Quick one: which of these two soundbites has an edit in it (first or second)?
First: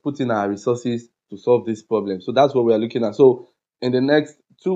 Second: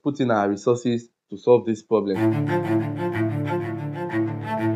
second